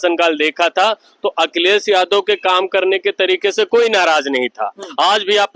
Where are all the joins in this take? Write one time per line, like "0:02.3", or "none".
none